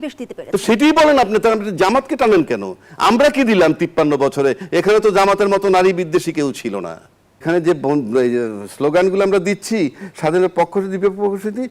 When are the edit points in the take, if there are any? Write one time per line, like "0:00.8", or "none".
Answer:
0:07.4